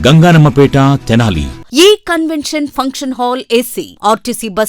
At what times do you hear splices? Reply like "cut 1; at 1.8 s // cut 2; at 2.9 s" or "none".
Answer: cut 1; at 1.6 s